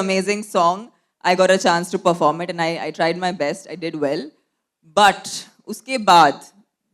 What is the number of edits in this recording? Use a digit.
0